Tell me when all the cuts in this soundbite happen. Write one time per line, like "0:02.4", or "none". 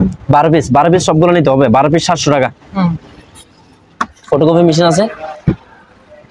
none

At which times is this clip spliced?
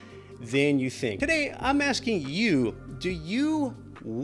0:01.2

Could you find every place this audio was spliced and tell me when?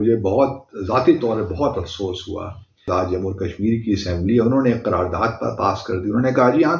0:02.9

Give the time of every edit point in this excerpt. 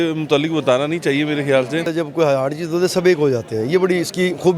0:01.9

